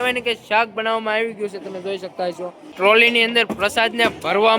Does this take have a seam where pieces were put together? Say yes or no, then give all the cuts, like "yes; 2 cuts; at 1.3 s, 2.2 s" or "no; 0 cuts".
yes; 1 cut; at 2.7 s